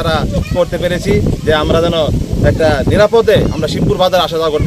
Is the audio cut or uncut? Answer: uncut